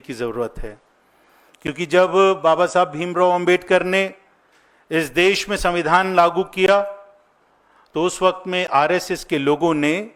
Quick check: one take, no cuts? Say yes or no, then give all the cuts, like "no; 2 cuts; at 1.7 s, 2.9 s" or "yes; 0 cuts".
yes; 0 cuts